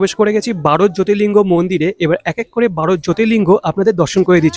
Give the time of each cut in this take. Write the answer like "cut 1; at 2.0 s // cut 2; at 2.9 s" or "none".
none